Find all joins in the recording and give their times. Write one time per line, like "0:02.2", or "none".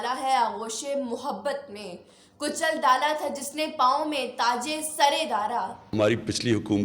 0:05.9